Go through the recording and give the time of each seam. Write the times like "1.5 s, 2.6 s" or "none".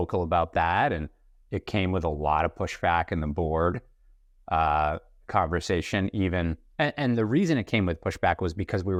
none